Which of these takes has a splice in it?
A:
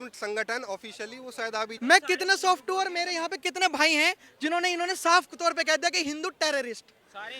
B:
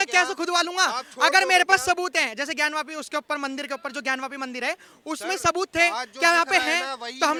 A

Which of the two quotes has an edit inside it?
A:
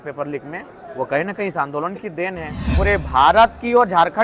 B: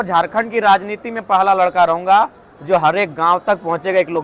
A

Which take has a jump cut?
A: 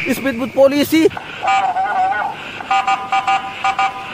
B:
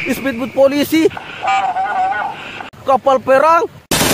B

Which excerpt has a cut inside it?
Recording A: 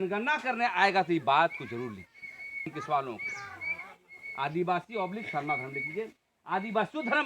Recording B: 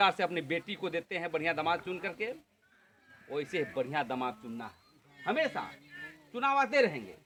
A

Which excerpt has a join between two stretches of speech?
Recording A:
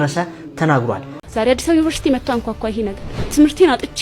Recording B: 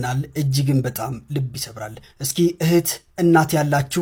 A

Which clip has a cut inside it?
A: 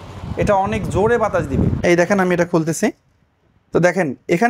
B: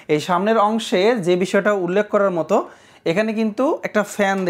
A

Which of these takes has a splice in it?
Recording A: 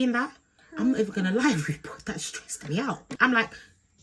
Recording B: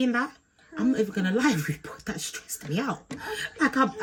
A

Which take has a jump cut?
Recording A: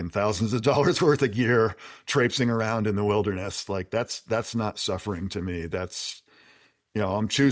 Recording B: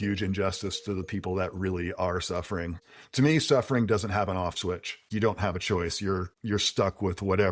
B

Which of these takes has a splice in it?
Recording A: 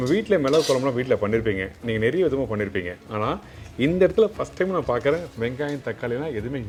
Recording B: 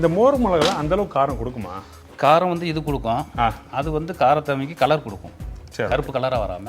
B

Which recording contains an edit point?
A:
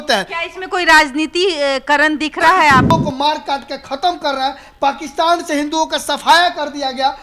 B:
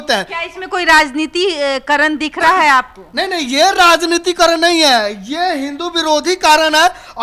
A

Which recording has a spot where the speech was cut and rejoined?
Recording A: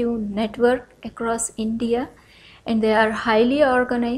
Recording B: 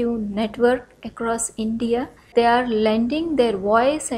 B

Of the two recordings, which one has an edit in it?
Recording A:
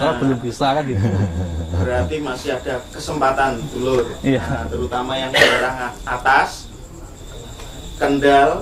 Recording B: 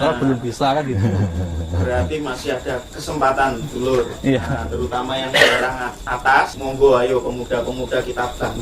B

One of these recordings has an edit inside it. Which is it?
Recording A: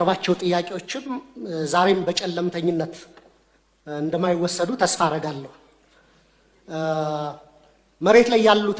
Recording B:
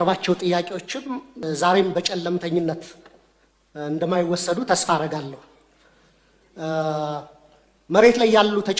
B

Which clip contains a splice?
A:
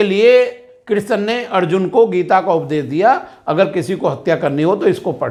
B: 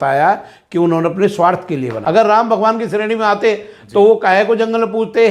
B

